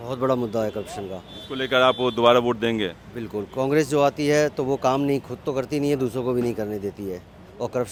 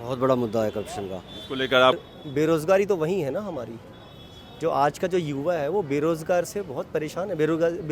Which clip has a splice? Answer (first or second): second